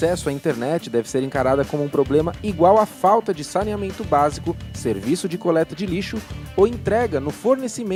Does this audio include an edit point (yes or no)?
no